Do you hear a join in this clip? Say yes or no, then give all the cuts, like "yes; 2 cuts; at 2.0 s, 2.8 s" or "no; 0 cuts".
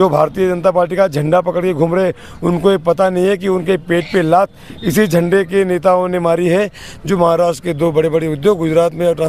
no; 0 cuts